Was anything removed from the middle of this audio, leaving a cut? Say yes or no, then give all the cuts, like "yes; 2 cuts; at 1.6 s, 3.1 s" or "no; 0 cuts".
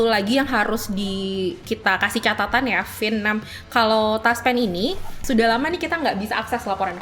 yes; 1 cut; at 5.1 s